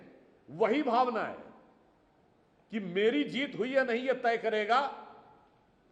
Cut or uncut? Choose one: uncut